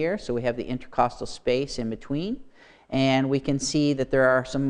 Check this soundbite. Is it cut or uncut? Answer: cut